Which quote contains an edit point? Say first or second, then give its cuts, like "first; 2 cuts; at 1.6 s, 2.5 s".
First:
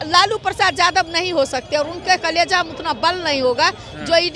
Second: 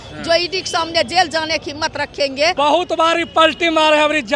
second; 1 cut; at 2.5 s